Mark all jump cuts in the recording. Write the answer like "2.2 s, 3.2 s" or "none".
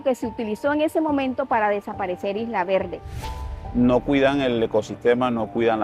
3.2 s